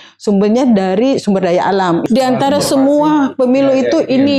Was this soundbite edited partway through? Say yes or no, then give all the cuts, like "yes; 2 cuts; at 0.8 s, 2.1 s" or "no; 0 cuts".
yes; 1 cut; at 2.0 s